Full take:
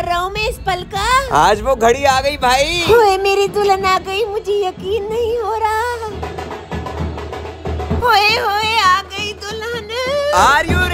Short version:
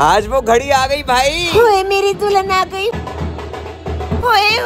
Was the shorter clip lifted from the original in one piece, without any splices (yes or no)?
no